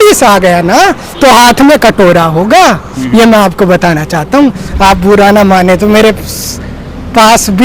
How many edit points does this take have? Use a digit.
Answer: 1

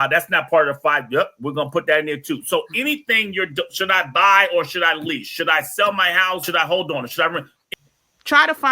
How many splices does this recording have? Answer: 2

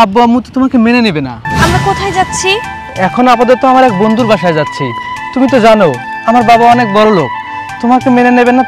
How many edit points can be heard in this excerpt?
1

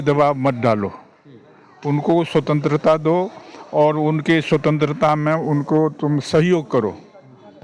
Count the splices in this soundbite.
0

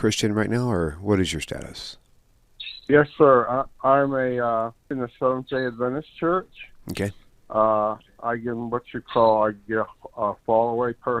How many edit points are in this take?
1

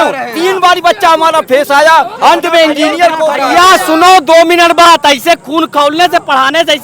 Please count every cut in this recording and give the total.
0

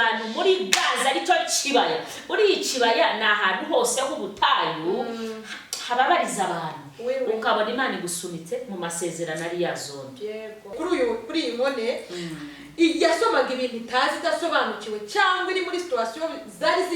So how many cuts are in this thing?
1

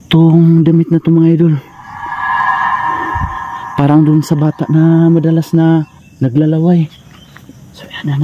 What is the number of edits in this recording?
2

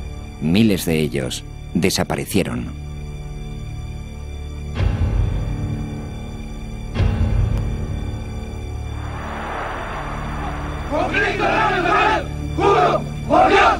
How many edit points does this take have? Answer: 0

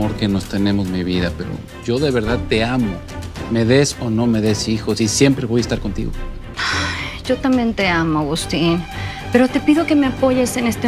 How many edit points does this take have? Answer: 1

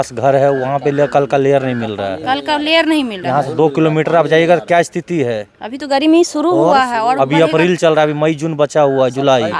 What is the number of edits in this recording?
0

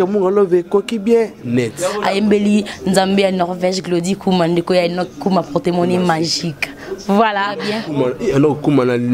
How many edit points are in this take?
2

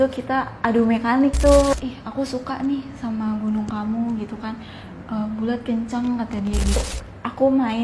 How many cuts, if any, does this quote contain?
2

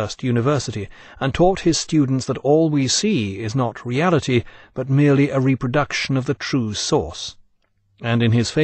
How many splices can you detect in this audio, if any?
1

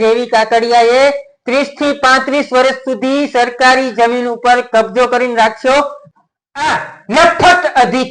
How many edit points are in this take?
1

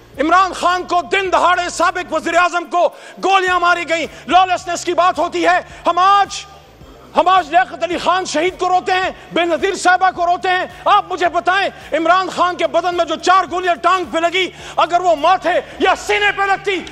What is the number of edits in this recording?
0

